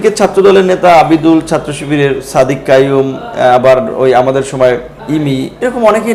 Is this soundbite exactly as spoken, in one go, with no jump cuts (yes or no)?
no